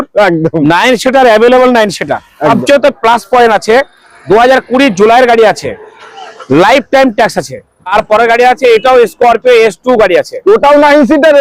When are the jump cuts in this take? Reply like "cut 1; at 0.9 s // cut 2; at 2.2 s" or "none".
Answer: cut 1; at 2.5 s // cut 2; at 7.9 s